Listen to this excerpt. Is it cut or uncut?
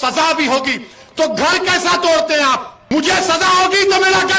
cut